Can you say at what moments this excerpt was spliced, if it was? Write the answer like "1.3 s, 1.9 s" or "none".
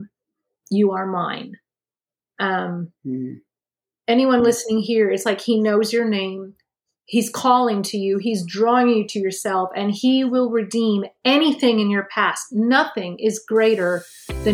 none